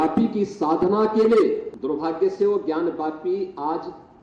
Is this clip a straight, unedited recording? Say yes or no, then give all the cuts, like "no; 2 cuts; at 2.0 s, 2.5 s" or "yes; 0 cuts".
no; 1 cut; at 1.7 s